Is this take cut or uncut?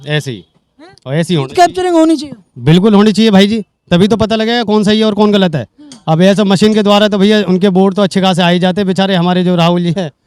uncut